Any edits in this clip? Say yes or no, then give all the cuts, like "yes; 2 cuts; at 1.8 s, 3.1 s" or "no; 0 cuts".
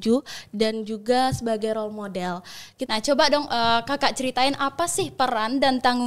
yes; 1 cut; at 2.7 s